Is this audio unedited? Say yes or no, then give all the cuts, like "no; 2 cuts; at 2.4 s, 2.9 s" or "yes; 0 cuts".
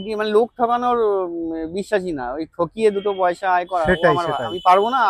yes; 0 cuts